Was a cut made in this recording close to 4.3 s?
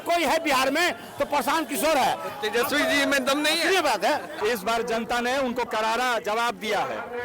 yes; 1 cut; at 4.3 s

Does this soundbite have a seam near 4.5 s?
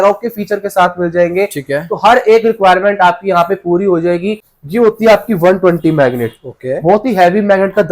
yes; 1 cut; at 4.5 s

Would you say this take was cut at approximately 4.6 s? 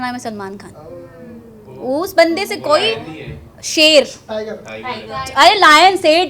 no; 0 cuts

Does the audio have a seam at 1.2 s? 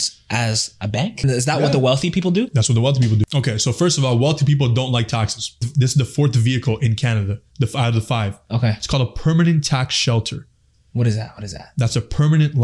yes; 3 cuts; at 1.2 s, 3.3 s, 5.6 s

